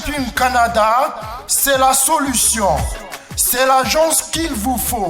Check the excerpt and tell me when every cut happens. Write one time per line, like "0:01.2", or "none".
none